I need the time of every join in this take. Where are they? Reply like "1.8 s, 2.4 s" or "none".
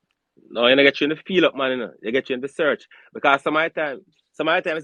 none